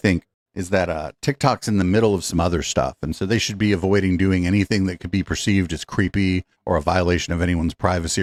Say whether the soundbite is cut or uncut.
uncut